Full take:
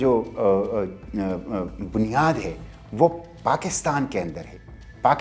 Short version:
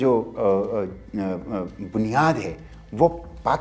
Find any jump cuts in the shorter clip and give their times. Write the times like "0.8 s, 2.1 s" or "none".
none